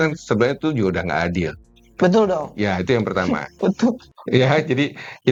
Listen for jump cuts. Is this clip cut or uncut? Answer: uncut